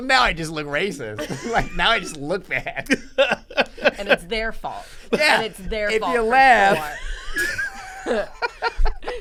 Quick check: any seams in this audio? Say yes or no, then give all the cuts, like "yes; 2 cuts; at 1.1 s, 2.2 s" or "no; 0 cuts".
no; 0 cuts